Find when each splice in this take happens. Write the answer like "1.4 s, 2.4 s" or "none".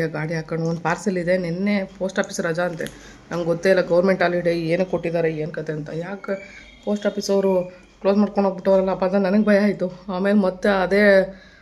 none